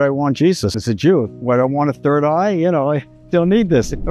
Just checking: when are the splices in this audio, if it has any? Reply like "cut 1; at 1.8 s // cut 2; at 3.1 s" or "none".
cut 1; at 0.8 s // cut 2; at 3.1 s